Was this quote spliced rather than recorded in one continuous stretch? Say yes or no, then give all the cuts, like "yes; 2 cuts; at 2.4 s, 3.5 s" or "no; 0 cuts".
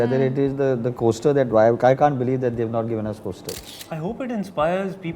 yes; 1 cut; at 3.7 s